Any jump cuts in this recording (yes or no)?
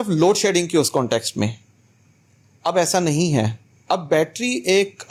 no